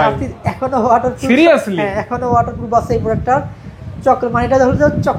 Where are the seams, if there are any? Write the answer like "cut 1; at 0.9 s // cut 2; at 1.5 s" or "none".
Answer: none